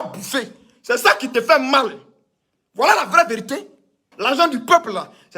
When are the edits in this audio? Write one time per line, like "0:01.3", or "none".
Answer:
0:04.1